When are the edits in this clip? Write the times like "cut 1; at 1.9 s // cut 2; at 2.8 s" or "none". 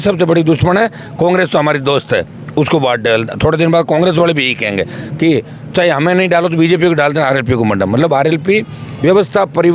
none